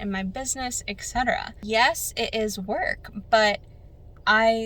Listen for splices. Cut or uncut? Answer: cut